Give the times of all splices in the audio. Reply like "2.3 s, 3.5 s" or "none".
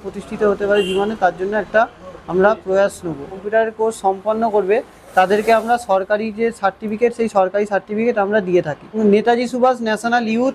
3.4 s, 9.0 s